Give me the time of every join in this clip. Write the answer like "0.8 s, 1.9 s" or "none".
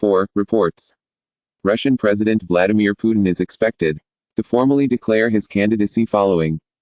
none